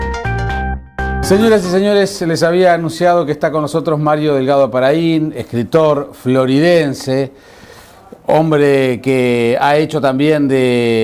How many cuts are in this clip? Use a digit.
1